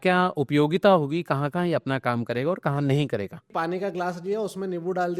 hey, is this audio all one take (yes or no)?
no